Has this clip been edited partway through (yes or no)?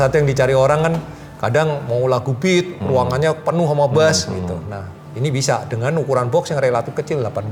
no